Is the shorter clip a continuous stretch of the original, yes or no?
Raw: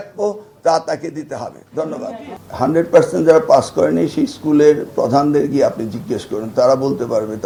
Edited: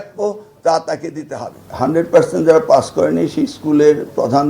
no